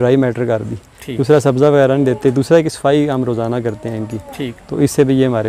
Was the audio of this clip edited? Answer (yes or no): no